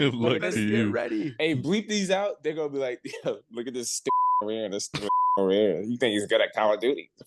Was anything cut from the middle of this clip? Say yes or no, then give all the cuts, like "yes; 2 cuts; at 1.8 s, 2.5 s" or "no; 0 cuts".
yes; 1 cut; at 4.1 s